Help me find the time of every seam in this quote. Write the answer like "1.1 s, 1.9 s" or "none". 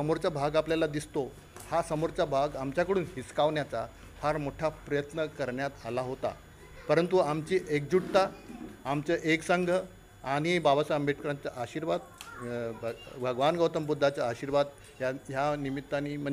none